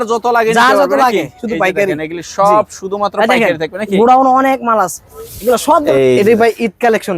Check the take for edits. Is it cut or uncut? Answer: cut